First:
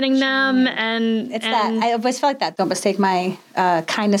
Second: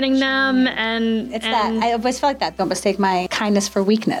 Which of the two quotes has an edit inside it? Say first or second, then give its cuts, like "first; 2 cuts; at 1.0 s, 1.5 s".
second; 1 cut; at 3.3 s